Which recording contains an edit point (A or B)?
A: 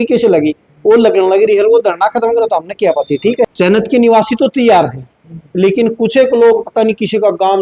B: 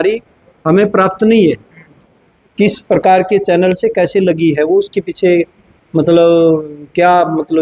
A